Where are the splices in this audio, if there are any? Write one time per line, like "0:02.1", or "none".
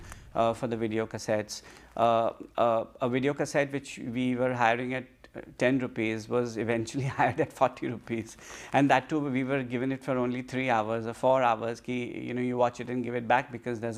none